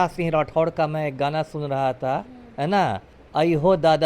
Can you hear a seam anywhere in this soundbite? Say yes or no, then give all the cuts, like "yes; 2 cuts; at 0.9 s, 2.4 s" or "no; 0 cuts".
yes; 1 cut; at 3.1 s